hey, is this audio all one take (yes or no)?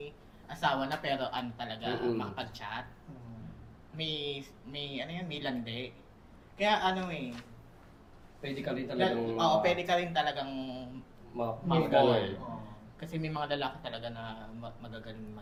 yes